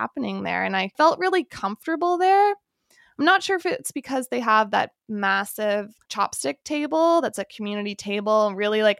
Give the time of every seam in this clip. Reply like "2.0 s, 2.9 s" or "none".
none